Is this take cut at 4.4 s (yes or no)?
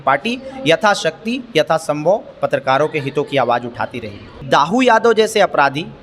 yes